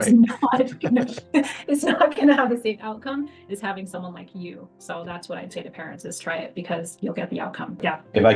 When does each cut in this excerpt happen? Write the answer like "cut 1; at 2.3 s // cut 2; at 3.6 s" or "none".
none